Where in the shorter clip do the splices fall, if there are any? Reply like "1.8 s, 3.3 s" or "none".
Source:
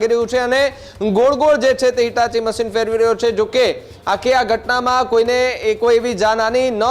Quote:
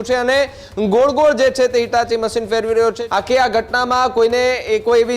3.0 s